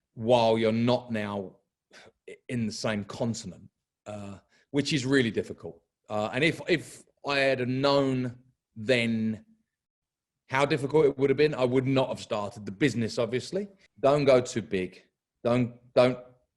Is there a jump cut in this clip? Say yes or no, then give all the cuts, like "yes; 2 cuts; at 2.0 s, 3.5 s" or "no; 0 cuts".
yes; 1 cut; at 13.8 s